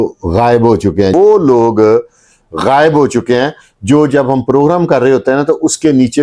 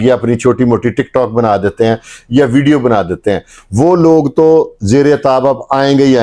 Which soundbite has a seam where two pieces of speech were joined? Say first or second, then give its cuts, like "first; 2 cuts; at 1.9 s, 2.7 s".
first; 1 cut; at 1.1 s